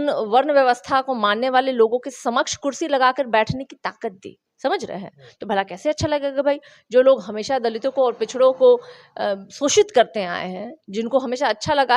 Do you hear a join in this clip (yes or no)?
no